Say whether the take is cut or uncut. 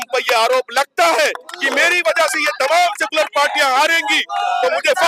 uncut